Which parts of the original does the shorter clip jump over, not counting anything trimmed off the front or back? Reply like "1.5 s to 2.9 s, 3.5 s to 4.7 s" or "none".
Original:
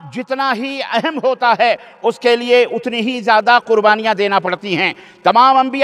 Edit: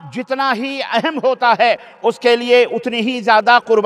none